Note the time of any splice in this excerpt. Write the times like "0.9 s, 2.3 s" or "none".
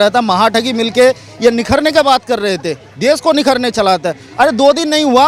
none